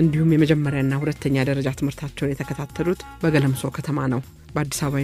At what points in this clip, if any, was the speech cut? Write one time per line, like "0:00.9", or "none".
none